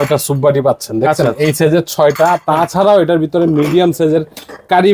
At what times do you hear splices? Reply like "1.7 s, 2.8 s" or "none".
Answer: none